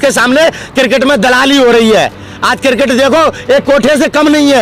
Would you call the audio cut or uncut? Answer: uncut